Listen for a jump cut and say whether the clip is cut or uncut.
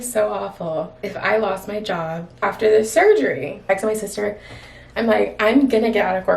cut